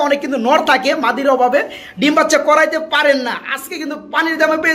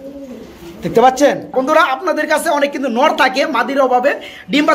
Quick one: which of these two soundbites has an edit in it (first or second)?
second